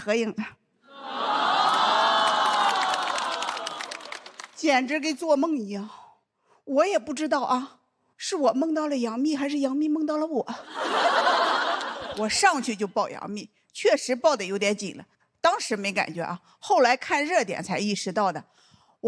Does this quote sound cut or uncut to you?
uncut